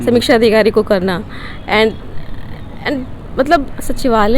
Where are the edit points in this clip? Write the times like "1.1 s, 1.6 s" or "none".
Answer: none